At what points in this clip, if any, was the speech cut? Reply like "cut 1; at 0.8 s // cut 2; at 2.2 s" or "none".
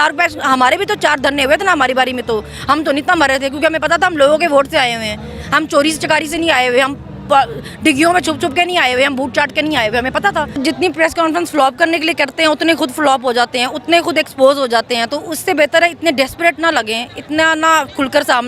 cut 1; at 10.6 s